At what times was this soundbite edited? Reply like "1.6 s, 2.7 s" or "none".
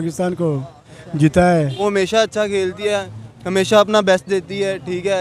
1.8 s